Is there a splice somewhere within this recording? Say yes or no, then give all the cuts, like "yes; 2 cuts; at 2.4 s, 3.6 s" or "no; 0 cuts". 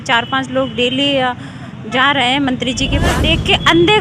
yes; 1 cut; at 3.1 s